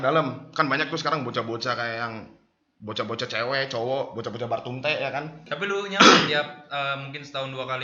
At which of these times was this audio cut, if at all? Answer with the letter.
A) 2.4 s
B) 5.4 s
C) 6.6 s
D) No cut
B